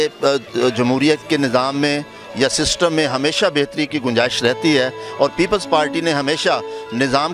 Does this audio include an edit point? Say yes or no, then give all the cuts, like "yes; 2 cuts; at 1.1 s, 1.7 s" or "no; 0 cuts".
no; 0 cuts